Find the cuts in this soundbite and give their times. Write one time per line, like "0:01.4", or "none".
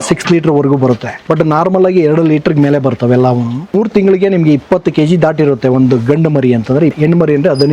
0:01.1
0:03.7
0:06.9